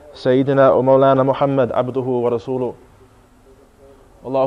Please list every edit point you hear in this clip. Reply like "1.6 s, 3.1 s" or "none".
none